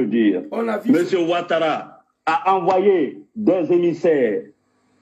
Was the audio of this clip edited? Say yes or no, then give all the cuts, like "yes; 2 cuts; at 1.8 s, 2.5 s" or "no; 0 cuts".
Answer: no; 0 cuts